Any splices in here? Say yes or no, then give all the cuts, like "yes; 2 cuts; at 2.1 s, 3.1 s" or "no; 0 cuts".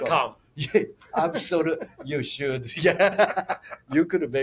no; 0 cuts